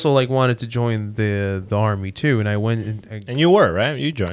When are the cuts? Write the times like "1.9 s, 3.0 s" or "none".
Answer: none